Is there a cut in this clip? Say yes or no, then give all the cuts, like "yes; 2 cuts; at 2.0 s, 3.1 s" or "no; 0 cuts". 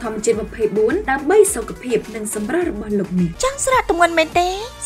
yes; 1 cut; at 3.3 s